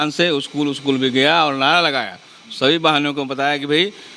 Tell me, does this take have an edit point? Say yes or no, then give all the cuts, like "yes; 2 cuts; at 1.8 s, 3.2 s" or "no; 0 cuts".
no; 0 cuts